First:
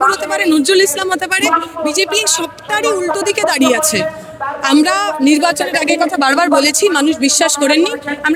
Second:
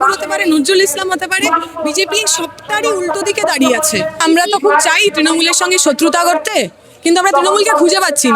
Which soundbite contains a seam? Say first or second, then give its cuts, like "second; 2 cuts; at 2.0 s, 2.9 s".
second; 1 cut; at 4.2 s